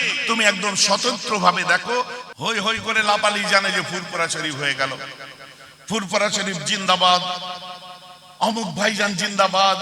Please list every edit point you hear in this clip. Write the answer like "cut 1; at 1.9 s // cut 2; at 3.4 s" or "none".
cut 1; at 2.2 s